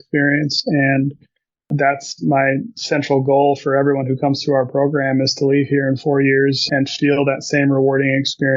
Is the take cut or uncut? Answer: cut